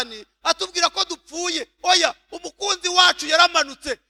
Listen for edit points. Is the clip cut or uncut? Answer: uncut